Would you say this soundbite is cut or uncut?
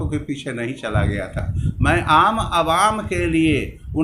uncut